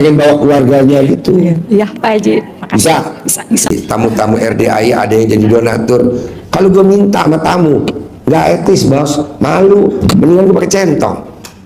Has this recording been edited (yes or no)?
yes